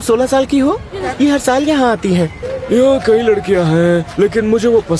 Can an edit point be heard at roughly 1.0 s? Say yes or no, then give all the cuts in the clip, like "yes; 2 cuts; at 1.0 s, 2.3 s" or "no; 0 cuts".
yes; 2 cuts; at 1.0 s, 2.5 s